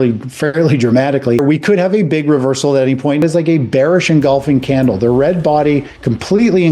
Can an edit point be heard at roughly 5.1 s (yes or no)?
no